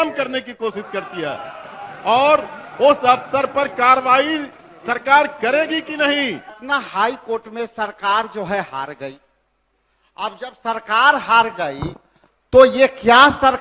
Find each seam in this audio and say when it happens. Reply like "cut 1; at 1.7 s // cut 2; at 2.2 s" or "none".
cut 1; at 6.6 s